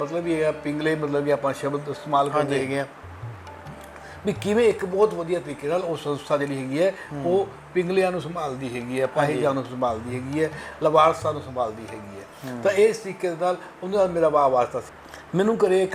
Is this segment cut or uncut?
cut